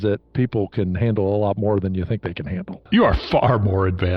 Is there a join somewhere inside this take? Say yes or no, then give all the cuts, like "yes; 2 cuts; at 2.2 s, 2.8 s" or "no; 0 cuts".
yes; 1 cut; at 2.8 s